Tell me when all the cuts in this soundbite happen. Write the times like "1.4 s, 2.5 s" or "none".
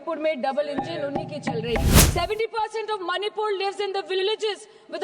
1.9 s